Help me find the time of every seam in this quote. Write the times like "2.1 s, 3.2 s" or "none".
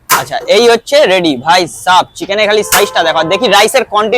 none